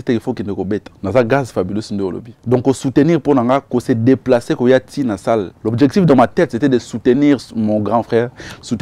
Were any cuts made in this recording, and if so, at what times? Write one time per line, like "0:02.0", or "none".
0:00.9
0:02.3
0:05.6

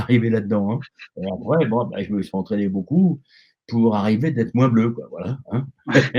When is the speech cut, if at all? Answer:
none

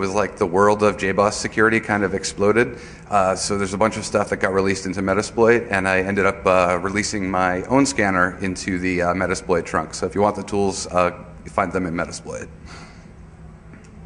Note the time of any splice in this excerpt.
0:08.4

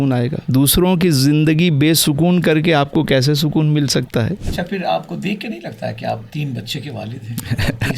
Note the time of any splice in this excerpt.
0:04.4

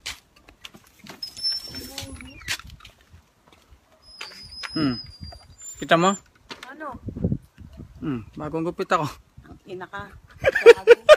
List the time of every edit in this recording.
none

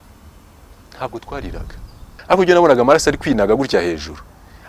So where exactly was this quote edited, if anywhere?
0:02.2

